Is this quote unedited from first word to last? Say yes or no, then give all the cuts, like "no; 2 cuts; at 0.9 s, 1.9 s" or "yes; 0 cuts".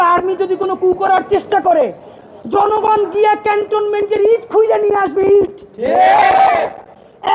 yes; 0 cuts